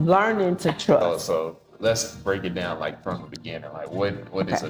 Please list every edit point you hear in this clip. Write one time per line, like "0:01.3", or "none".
0:01.0